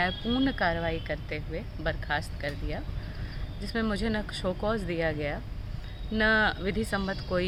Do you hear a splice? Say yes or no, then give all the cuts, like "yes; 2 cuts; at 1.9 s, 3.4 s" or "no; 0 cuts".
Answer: no; 0 cuts